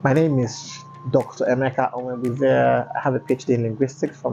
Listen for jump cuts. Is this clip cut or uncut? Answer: uncut